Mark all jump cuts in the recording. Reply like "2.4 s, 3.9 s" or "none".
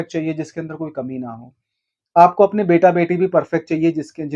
none